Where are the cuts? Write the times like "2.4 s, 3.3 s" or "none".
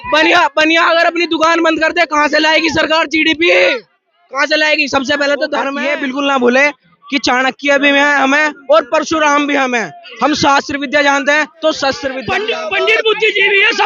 5.8 s, 12.1 s